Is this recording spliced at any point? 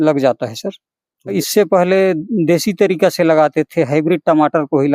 yes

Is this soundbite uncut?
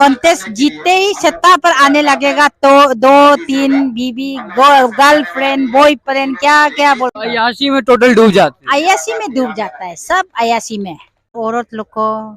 no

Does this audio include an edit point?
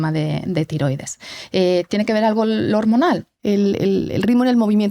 yes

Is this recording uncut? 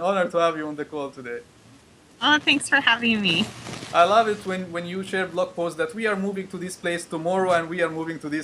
yes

